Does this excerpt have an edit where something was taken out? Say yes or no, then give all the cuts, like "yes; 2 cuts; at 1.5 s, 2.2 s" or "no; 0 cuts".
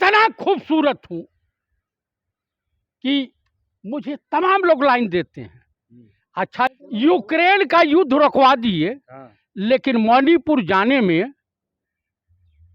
yes; 1 cut; at 6.7 s